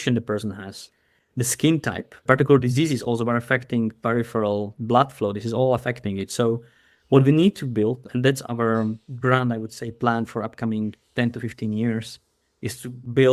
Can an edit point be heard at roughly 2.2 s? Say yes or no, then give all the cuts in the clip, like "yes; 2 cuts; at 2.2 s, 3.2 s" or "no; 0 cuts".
yes; 1 cut; at 2.2 s